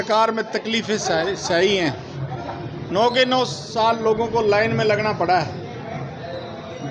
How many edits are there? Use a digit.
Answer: 0